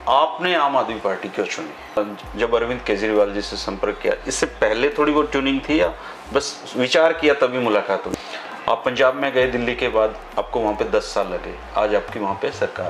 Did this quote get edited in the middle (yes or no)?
yes